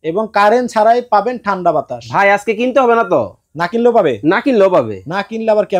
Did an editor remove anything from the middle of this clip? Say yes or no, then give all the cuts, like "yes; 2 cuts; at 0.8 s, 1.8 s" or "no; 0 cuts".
no; 0 cuts